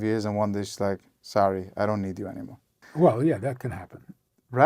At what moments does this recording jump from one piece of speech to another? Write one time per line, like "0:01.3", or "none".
0:02.8